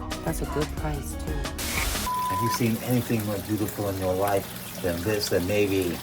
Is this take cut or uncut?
cut